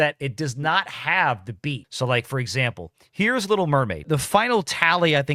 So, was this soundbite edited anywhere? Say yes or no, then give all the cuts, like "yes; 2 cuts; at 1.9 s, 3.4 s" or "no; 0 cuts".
no; 0 cuts